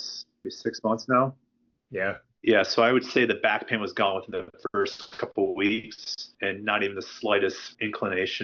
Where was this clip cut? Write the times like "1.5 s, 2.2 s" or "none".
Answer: none